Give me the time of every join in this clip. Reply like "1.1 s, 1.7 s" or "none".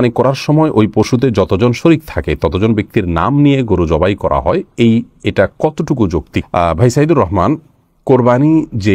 none